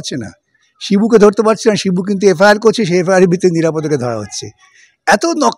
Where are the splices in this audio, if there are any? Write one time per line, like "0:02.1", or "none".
none